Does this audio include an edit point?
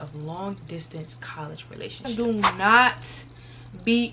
yes; 1 cut; at 2.0 s

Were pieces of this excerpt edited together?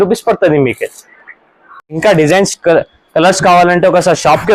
yes; 1 cut; at 2.0 s

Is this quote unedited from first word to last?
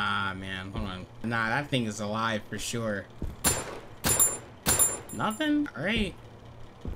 no; 1 cut; at 3.2 s

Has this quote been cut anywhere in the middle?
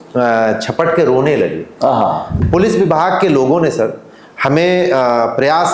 yes; 1 cut; at 2.3 s

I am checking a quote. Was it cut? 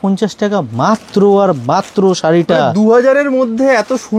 no; 0 cuts

